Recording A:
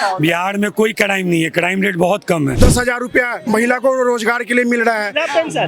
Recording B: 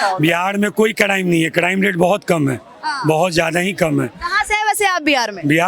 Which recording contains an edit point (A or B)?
A